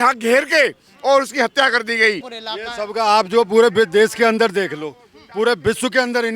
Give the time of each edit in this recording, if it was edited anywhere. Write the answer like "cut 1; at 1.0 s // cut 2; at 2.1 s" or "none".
cut 1; at 2.4 s